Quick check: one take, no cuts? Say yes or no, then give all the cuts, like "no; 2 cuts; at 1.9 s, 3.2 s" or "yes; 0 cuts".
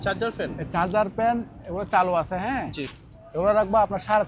yes; 0 cuts